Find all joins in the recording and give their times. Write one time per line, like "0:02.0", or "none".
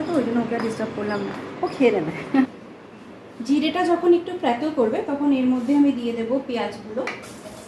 0:02.4